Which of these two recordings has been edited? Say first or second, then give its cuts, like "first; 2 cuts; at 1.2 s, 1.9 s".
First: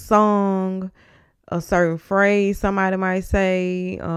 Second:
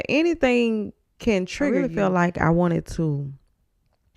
second; 1 cut; at 1.9 s